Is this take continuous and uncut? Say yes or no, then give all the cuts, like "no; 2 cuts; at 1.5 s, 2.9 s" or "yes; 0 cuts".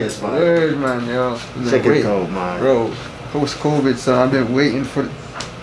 no; 1 cut; at 1.5 s